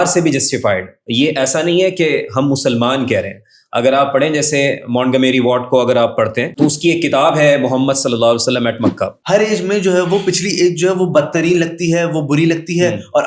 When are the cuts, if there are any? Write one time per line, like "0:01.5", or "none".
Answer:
0:01.0
0:09.2